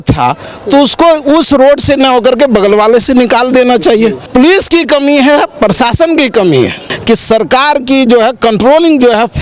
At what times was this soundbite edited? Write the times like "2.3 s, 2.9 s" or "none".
4.3 s, 6.9 s